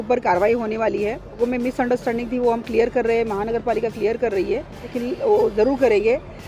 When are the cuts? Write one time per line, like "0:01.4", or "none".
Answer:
0:01.4
0:04.9

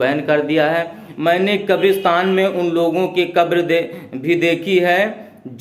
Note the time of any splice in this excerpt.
0:01.1

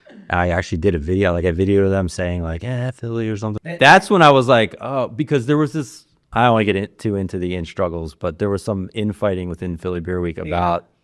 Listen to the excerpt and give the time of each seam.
0:03.6

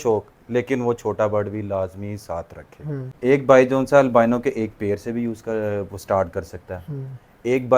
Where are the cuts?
0:03.0

